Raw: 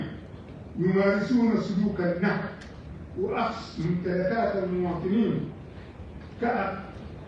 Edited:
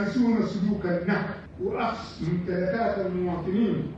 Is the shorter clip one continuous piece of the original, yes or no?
no